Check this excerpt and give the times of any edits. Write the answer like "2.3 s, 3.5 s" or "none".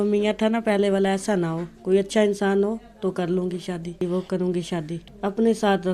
4.0 s, 5.0 s

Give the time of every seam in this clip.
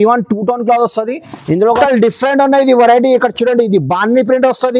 1.8 s

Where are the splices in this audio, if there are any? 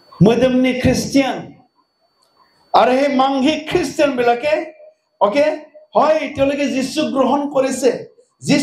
none

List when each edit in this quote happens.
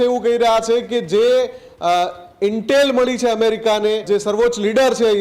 4.0 s

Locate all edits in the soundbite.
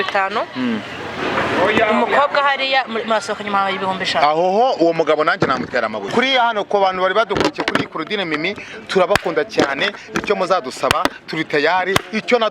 6.1 s

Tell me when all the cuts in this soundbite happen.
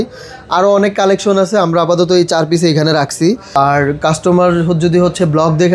3.5 s

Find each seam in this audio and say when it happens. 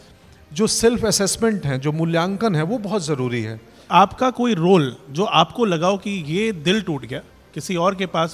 3.8 s

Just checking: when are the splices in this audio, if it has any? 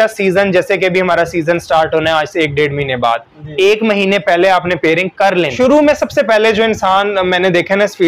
5.5 s

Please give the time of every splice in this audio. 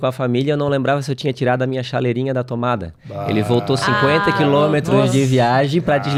none

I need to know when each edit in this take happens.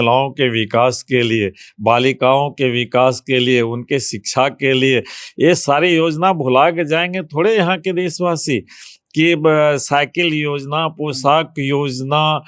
none

